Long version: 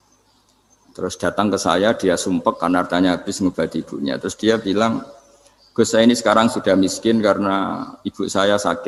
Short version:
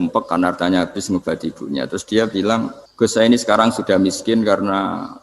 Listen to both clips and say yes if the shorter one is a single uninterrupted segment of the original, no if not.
no